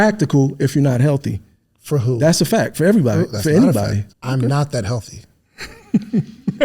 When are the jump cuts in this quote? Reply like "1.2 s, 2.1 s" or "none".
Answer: 4.1 s